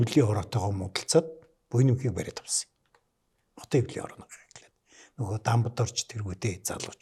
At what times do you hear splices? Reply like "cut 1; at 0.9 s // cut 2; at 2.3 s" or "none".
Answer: none